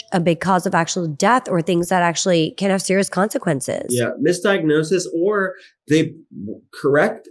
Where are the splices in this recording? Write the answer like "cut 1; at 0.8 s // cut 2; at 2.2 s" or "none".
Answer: none